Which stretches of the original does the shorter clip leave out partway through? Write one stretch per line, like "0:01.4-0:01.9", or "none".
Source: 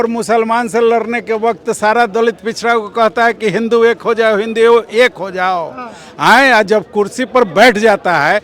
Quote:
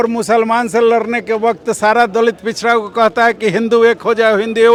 none